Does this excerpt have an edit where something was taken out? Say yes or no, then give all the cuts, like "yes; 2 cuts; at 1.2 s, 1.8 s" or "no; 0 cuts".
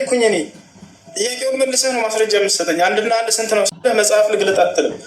yes; 1 cut; at 3.7 s